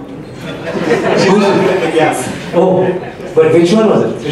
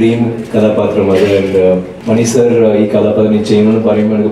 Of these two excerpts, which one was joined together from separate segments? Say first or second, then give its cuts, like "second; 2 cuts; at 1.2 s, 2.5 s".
second; 1 cut; at 1.9 s